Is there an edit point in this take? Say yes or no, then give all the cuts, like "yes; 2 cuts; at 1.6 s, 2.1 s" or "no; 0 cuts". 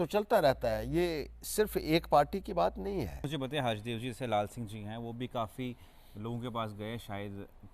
yes; 1 cut; at 3.2 s